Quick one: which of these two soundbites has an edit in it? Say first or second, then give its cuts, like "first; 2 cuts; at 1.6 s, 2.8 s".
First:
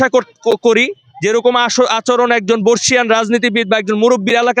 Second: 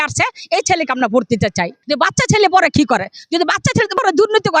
second; 1 cut; at 1.8 s